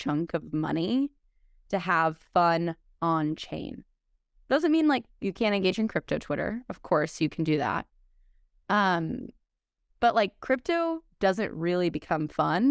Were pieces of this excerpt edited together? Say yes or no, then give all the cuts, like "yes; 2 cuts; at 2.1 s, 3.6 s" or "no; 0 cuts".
no; 0 cuts